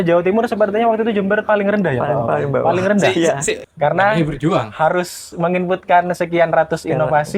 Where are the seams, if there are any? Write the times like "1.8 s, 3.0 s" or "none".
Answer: 3.5 s